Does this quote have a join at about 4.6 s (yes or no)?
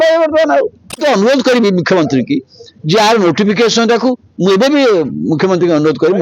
no